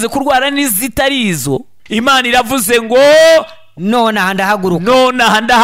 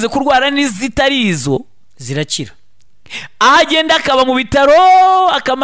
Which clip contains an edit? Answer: first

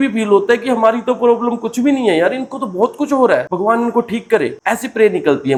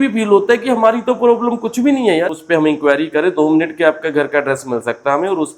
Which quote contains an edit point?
second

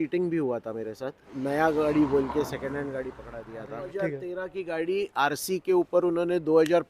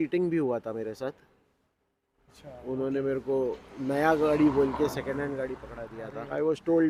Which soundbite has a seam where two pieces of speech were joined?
first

